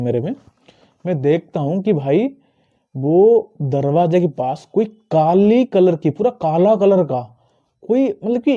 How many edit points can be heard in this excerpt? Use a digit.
0